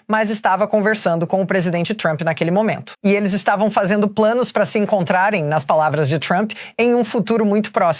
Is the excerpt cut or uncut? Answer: uncut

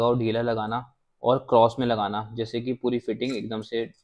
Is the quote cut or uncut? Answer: uncut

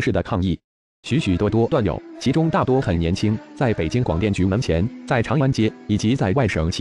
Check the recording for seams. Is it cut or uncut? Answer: uncut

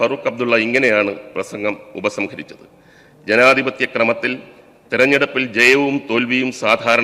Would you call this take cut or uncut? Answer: uncut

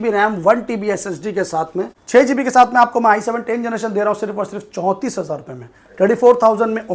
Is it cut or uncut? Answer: cut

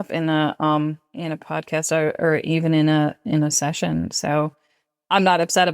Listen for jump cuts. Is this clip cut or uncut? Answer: cut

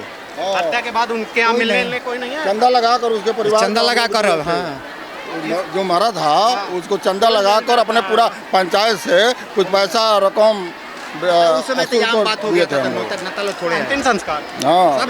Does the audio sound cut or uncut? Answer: uncut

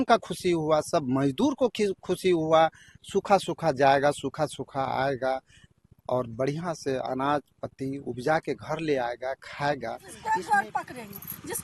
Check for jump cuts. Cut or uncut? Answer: cut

